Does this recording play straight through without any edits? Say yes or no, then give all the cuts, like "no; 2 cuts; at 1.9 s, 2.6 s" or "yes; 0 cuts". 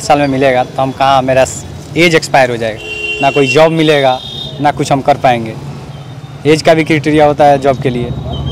yes; 0 cuts